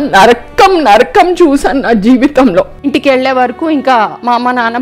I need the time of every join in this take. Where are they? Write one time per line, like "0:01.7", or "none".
0:02.8